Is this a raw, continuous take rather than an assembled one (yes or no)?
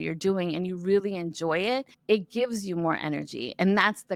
yes